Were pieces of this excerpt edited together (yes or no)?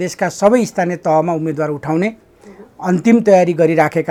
no